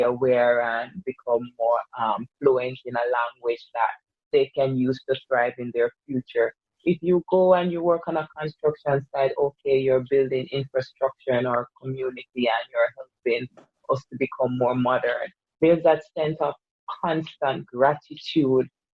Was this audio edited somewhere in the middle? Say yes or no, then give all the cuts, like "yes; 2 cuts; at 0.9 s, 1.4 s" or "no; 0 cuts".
no; 0 cuts